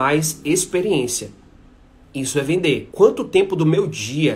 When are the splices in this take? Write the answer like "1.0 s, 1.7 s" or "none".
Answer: 2.9 s